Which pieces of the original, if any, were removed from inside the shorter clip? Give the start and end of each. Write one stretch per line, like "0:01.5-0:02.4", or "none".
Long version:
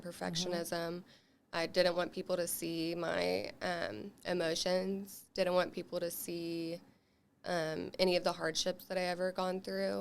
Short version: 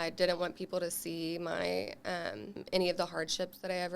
0:04.2-0:07.9